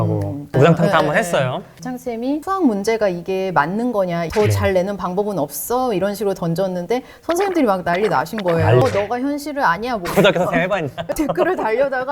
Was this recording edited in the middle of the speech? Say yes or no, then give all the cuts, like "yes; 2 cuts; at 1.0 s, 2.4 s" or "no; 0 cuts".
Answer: yes; 4 cuts; at 1.8 s, 4.3 s, 8.8 s, 11.1 s